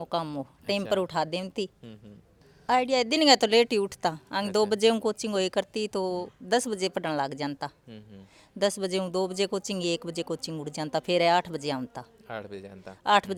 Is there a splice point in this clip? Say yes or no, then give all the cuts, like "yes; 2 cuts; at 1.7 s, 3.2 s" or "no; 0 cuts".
no; 0 cuts